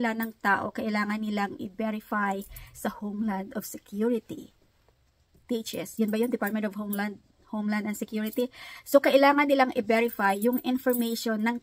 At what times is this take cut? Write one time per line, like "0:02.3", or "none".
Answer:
none